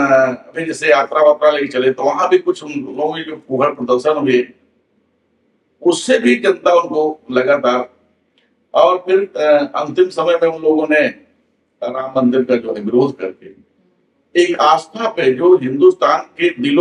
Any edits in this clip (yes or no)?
no